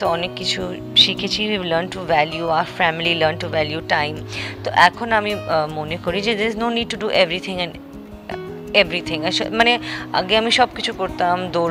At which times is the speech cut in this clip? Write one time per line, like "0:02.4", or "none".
none